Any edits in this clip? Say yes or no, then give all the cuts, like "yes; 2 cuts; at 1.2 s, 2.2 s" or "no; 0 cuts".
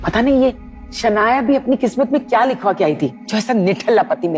no; 0 cuts